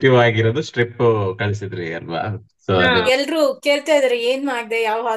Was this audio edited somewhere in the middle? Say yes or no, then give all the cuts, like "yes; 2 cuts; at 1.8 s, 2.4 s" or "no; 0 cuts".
yes; 1 cut; at 2.7 s